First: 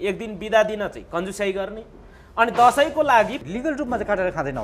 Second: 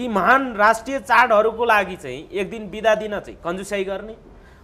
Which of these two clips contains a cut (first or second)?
first